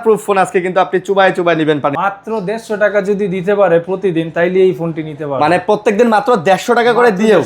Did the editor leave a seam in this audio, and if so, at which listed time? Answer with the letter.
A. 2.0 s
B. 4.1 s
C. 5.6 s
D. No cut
A